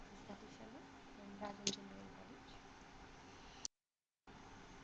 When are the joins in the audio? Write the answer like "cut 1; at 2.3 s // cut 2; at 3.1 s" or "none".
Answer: cut 1; at 3.7 s